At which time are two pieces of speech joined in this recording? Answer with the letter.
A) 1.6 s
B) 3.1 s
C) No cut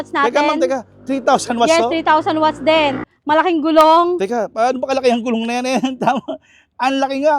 B